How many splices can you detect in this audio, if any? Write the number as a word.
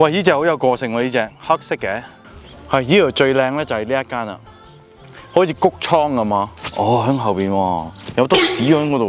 zero